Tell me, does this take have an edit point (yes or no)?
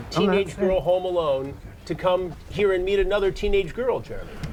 no